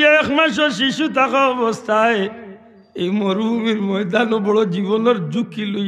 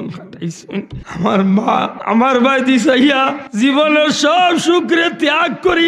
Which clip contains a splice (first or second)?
second